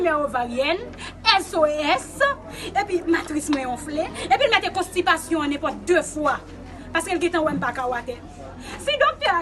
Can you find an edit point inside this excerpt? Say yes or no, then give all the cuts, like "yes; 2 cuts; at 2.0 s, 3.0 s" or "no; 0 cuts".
no; 0 cuts